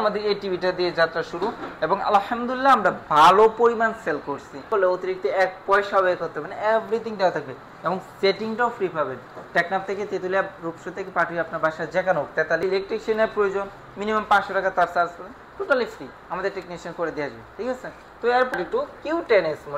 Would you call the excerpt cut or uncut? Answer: cut